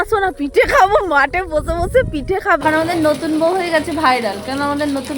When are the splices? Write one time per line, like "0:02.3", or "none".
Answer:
0:02.6